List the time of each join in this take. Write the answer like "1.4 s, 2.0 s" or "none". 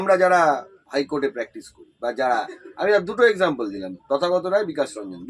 none